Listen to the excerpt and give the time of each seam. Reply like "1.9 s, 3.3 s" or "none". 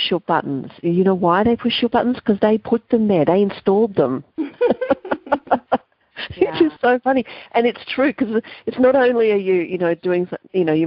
none